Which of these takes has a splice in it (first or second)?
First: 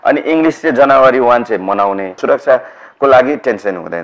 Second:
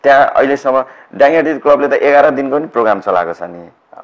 first